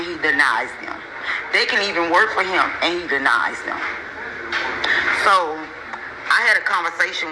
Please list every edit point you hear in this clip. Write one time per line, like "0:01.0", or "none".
none